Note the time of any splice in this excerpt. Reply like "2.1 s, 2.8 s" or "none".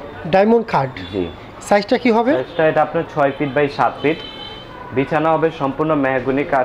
none